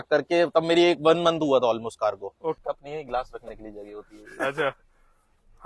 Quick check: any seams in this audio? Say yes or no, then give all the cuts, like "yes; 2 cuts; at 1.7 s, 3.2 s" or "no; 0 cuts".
yes; 1 cut; at 2.6 s